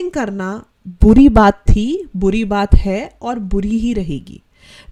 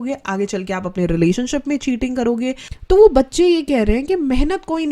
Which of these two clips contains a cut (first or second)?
second